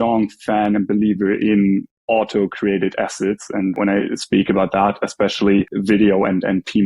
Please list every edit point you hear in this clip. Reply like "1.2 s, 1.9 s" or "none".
3.8 s, 5.7 s